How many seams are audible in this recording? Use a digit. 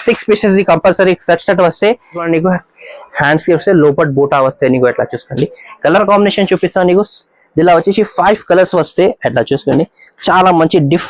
1